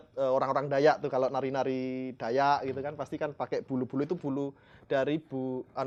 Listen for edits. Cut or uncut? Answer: uncut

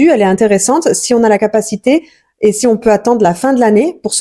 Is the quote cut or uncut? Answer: uncut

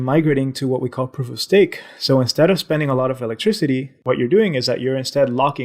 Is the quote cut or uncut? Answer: cut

